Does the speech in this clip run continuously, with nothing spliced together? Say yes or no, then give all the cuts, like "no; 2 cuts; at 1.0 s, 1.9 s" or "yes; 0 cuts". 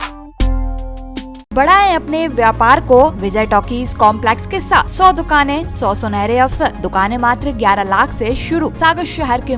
no; 6 cuts; at 1.5 s, 3.2 s, 4.9 s, 5.7 s, 6.8 s, 8.7 s